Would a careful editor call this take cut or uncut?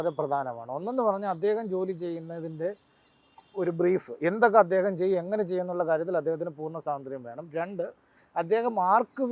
uncut